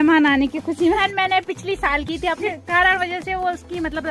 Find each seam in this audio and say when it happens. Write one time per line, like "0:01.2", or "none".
0:01.0
0:02.4